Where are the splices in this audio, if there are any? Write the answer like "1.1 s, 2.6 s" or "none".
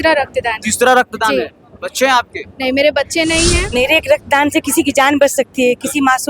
3.6 s